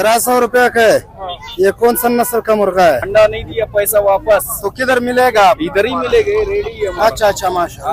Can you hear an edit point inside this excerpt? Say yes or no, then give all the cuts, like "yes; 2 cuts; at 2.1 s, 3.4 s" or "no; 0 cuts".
yes; 1 cut; at 3.0 s